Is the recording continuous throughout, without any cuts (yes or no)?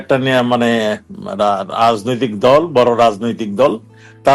yes